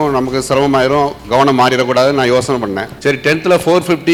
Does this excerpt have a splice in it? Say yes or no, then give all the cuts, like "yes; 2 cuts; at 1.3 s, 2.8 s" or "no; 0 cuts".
no; 0 cuts